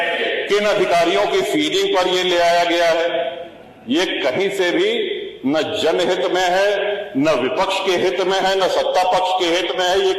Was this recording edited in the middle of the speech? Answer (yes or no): no